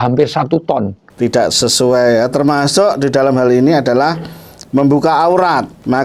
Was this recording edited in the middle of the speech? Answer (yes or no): yes